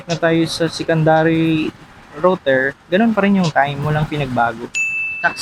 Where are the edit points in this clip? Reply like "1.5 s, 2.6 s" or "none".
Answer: none